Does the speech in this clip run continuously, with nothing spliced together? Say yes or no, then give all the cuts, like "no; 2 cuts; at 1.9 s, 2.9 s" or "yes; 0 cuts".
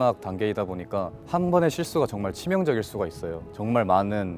no; 2 cuts; at 1.2 s, 3.4 s